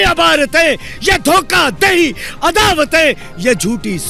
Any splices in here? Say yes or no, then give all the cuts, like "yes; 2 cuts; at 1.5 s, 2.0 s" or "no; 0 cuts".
no; 0 cuts